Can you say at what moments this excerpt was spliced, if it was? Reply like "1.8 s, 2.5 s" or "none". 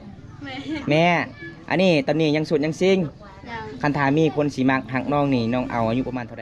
none